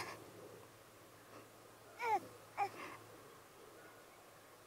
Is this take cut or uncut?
uncut